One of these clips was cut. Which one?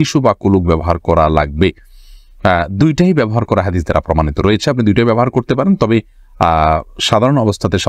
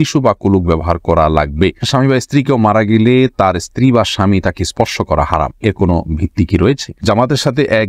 second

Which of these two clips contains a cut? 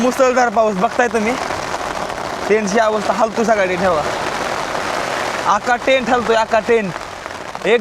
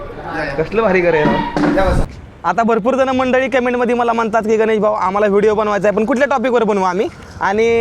second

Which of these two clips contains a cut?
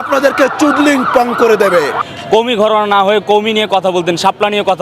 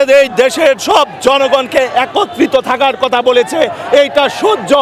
first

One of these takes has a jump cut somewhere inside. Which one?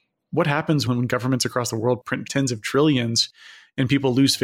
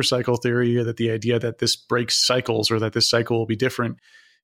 first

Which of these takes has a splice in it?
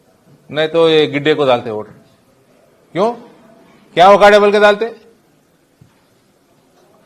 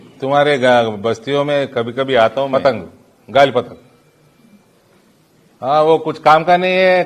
second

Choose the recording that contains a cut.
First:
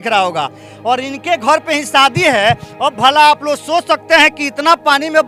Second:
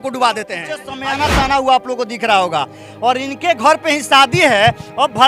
second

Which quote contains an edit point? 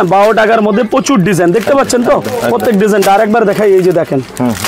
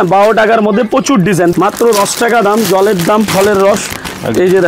second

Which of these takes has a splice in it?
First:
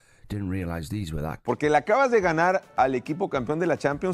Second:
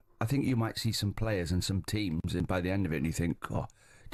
first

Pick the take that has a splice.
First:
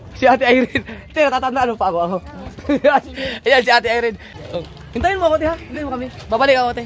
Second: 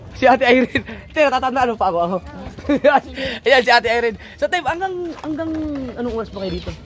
first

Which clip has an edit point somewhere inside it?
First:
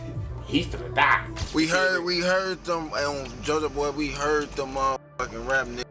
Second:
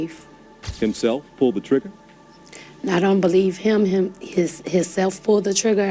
first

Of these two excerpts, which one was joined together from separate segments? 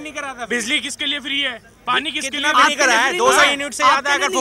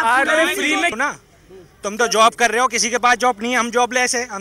second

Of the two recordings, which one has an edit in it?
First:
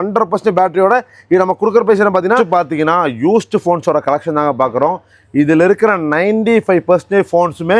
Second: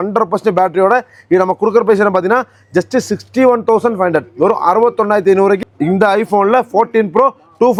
first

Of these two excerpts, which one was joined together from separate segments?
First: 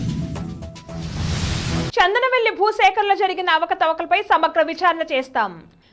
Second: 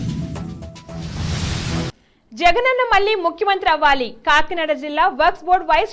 first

